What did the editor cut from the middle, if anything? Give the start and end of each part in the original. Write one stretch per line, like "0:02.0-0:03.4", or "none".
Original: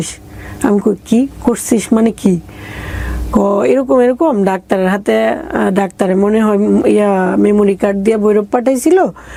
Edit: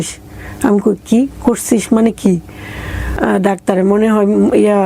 0:03.1-0:05.4